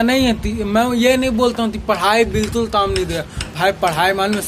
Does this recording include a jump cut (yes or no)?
no